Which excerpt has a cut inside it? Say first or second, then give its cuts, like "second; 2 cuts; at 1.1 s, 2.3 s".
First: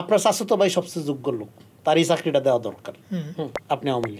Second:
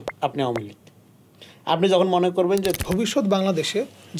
second; 1 cut; at 2.8 s